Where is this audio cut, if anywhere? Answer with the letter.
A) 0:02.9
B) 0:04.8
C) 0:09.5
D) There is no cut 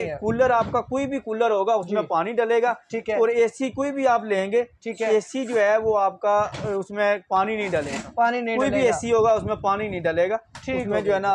D